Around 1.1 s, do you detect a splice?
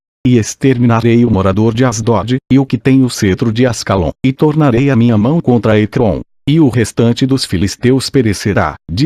no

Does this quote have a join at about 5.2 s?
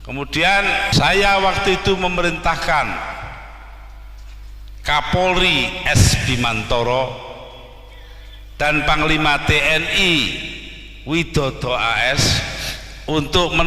no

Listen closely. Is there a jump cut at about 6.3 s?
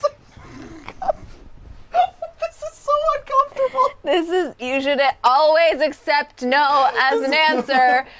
no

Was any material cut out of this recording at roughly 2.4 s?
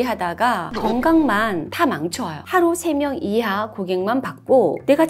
yes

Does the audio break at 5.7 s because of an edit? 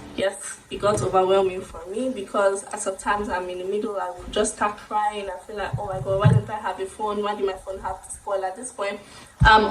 no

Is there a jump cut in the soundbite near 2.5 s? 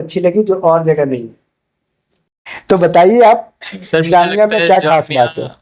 yes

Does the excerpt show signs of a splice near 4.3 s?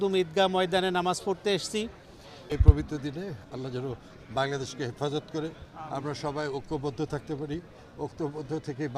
no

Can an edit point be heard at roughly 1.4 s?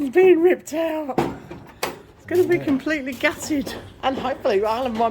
no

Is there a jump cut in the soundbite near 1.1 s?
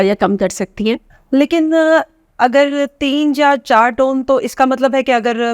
yes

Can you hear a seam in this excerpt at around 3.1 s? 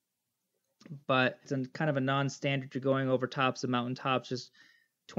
no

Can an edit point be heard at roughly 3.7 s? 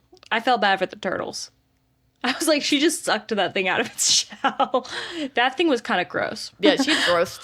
no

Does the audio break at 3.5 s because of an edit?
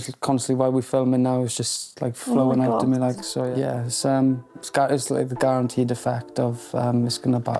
yes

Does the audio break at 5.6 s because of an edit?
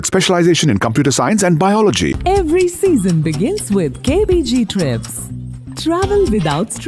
no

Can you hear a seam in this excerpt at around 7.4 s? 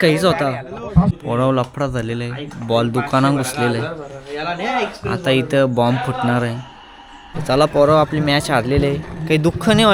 yes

